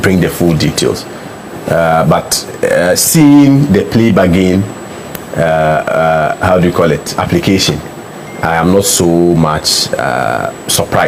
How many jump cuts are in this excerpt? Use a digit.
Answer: 0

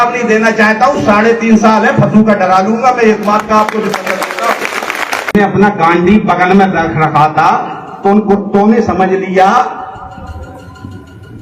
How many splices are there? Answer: 1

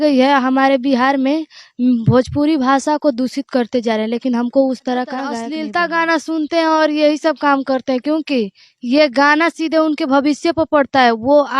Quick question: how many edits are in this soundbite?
1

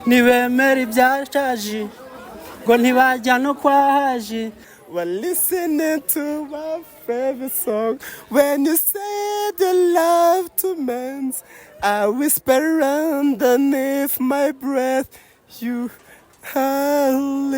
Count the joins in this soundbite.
1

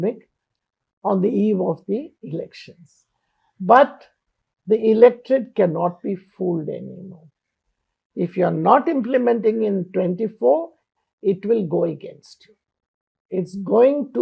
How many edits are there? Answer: 0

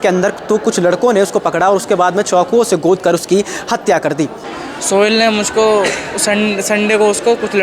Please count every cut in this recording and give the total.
1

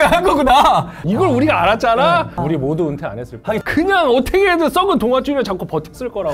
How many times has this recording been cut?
3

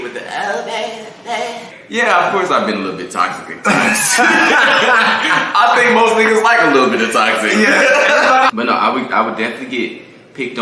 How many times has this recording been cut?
2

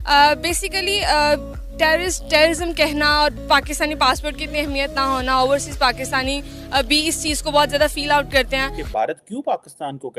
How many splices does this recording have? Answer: 1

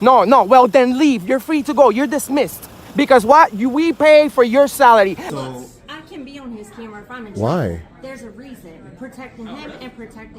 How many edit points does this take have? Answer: 1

